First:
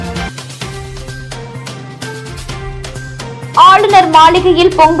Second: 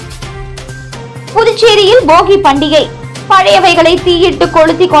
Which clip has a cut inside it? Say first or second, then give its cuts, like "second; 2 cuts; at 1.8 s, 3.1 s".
second; 1 cut; at 1.1 s